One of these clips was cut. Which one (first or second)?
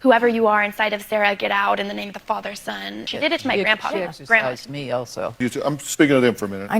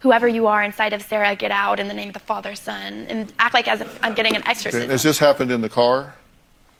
first